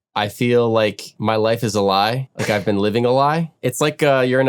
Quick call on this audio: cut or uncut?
cut